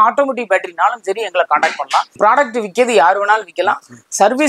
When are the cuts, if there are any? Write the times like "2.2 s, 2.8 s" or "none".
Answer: 2.1 s